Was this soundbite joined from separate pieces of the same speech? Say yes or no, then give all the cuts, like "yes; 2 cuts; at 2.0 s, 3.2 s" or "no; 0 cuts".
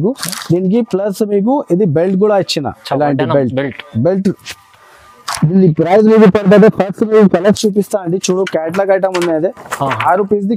no; 0 cuts